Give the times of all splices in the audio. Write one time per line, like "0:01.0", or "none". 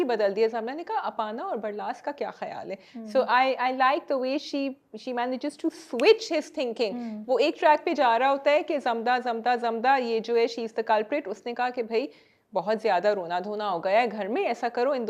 none